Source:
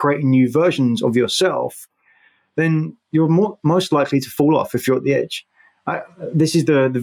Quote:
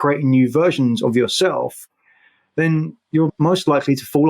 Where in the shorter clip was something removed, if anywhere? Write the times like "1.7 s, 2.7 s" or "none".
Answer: 3.3 s